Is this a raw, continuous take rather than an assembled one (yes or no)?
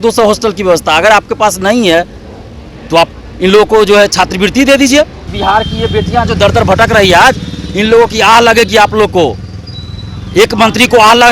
no